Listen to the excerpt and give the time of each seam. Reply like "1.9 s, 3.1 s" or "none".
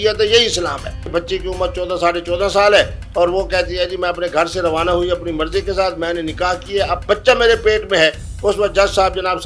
1.1 s